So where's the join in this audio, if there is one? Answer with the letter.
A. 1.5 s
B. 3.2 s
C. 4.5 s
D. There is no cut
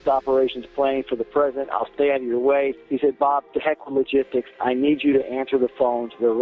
B